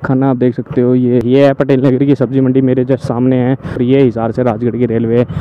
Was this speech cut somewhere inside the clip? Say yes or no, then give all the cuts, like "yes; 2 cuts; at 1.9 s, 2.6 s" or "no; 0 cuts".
yes; 2 cuts; at 1.2 s, 3.8 s